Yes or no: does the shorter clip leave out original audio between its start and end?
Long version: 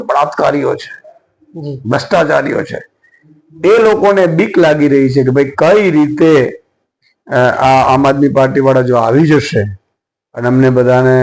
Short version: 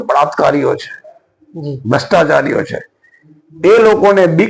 no